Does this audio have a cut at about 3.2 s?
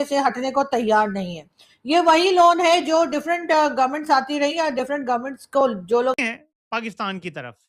no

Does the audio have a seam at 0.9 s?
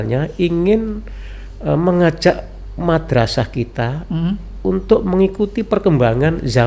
no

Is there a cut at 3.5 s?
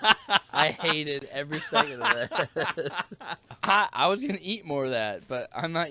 yes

